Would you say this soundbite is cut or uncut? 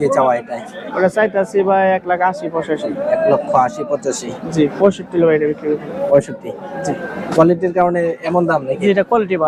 uncut